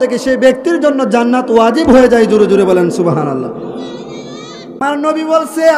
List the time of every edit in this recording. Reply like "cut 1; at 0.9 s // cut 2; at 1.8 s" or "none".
cut 1; at 4.8 s